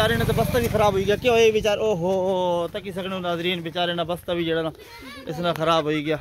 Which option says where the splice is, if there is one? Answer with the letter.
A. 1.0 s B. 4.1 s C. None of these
C